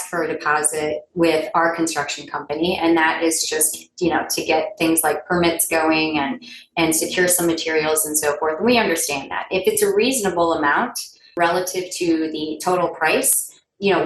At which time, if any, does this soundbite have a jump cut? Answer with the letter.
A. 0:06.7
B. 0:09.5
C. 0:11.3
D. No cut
C